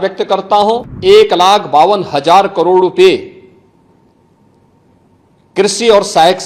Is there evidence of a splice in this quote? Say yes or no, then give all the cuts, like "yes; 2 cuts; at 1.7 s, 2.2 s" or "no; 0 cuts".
yes; 1 cut; at 0.9 s